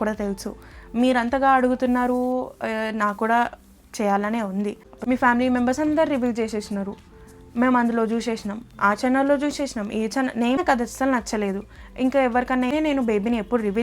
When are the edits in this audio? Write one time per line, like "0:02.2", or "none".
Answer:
0:04.9
0:10.6
0:12.7